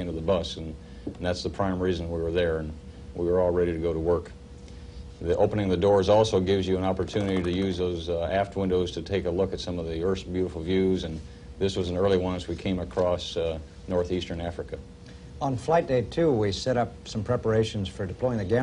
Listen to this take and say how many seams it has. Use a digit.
1